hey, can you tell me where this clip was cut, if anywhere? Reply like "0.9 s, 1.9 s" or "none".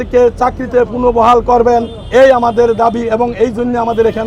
none